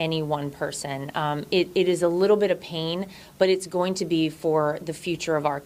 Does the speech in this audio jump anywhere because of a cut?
no; 0 cuts

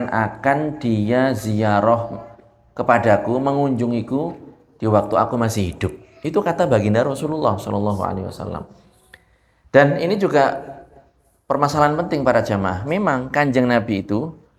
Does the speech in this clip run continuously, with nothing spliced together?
yes; 0 cuts

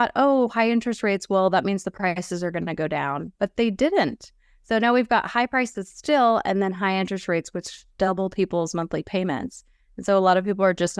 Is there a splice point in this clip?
no; 0 cuts

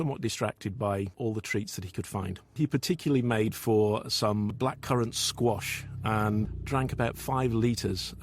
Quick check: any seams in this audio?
yes; 2 cuts; at 1.1 s, 4.5 s

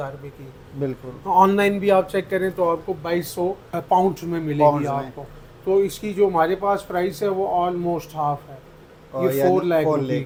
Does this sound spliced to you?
no; 0 cuts

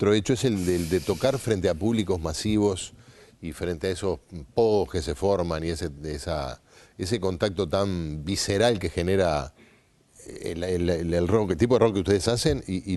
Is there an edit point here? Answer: no; 0 cuts

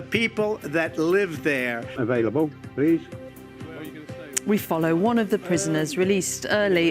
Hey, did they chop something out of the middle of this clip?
yes; 1 cut; at 2.0 s

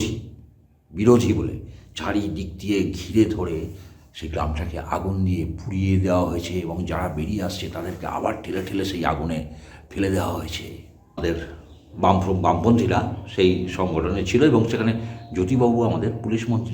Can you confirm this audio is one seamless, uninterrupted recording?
no; 1 cut; at 11.2 s

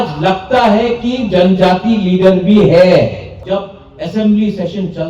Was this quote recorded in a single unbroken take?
no; 1 cut; at 3.3 s

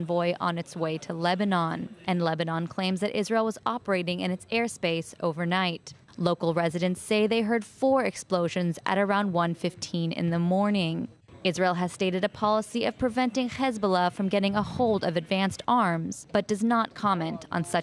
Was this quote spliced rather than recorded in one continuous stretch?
no; 0 cuts

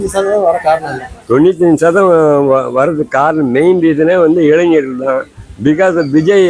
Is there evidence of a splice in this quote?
no; 0 cuts

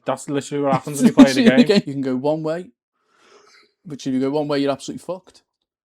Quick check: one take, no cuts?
no; 1 cut; at 1.9 s

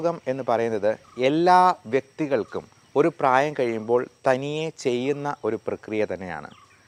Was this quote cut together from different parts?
no; 0 cuts

